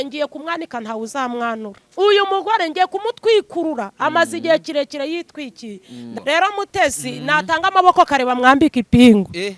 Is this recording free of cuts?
no; 2 cuts; at 1.8 s, 6.1 s

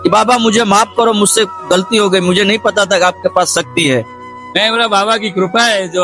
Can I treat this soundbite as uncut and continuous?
no; 1 cut; at 4.2 s

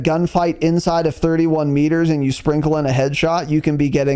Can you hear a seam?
no; 0 cuts

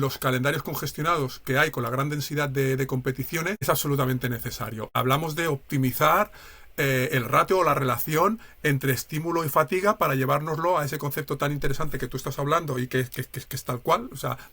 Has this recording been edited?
yes; 2 cuts; at 3.6 s, 4.9 s

